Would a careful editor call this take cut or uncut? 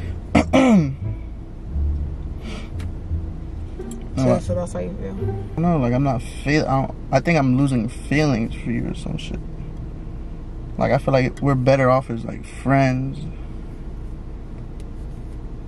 cut